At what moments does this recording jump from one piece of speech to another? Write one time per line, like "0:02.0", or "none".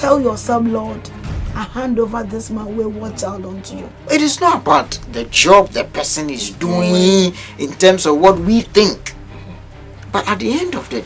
0:03.9